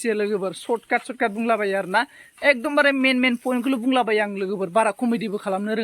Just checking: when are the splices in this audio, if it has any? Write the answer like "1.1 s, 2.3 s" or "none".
none